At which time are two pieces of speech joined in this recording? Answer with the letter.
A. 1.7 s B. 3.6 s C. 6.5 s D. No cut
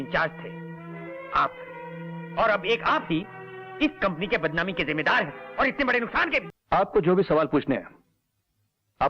C